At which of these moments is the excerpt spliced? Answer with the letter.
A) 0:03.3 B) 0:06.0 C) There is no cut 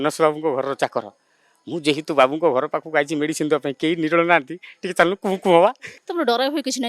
B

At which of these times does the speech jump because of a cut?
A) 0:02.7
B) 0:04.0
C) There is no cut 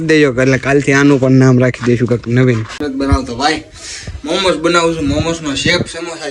A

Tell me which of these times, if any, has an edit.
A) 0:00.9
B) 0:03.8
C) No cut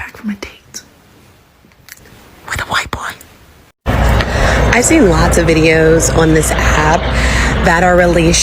B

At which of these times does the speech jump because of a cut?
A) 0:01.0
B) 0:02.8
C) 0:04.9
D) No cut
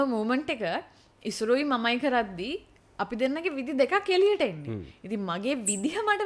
D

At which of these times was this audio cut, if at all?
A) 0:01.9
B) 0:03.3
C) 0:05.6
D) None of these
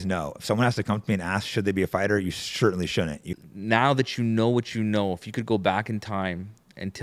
B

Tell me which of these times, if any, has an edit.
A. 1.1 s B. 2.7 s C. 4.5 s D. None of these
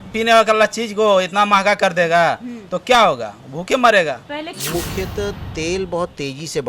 C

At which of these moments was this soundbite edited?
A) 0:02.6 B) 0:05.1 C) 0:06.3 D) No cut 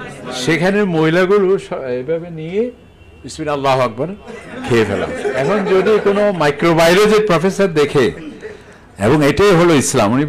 D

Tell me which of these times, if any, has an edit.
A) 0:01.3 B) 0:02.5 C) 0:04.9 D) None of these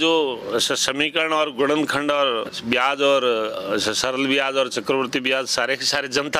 B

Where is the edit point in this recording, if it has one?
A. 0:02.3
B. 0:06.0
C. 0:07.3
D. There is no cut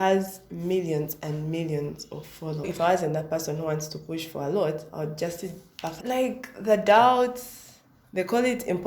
B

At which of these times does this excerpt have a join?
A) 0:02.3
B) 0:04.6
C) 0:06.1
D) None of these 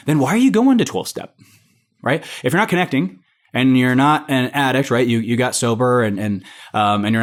D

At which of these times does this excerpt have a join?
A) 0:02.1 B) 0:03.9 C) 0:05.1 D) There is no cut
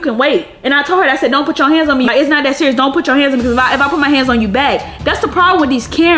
A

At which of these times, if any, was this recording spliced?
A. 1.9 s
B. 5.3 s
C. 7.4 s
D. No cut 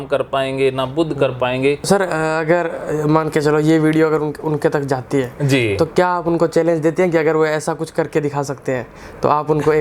A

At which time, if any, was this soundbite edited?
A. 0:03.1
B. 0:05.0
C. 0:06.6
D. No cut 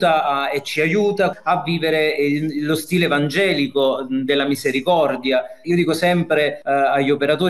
C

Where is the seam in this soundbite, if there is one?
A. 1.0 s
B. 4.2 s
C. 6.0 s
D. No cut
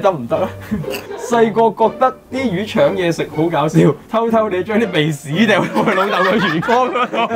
A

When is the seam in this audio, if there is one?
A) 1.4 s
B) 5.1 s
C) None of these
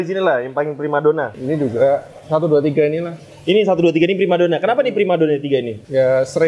A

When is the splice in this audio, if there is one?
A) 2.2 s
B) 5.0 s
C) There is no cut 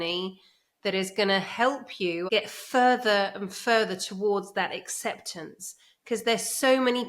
A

